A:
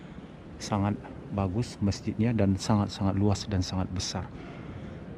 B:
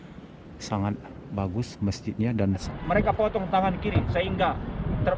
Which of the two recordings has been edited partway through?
B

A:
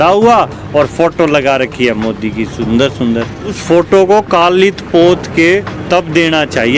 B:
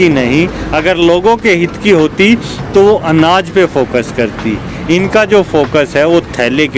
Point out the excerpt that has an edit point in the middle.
A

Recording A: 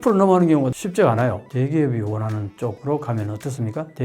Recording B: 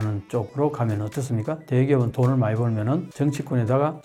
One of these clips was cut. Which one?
A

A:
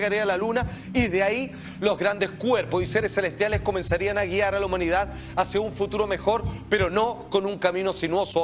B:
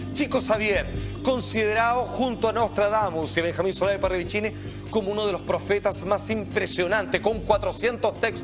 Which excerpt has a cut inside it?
A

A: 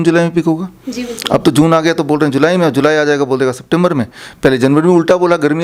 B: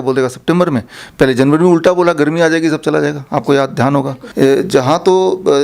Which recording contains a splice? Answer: B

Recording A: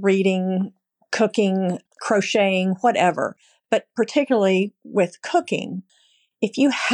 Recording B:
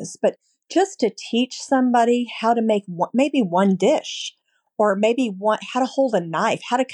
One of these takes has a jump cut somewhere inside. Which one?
A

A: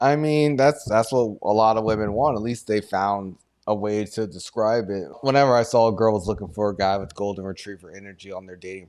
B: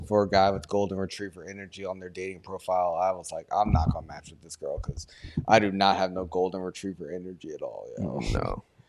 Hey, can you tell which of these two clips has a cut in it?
A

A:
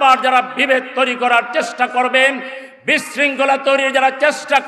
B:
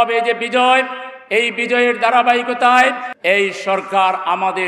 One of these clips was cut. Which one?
B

